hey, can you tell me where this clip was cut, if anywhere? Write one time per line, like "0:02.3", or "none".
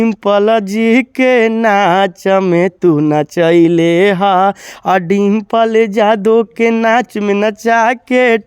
none